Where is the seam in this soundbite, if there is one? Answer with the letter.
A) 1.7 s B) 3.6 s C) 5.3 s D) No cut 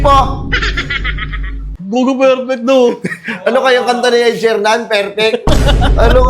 A